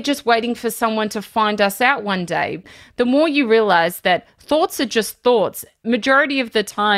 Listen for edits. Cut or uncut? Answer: cut